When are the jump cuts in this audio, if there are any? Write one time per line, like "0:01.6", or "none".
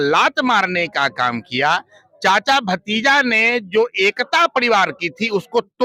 none